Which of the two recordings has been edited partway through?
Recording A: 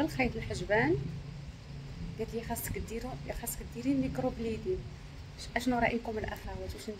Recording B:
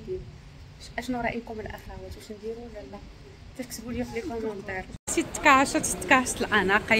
B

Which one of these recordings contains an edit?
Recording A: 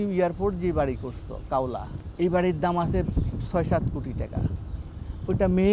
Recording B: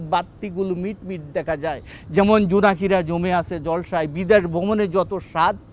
A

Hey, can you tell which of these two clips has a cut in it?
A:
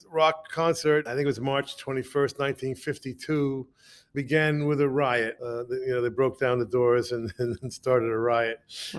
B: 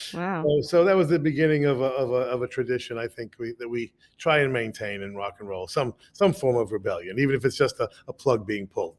A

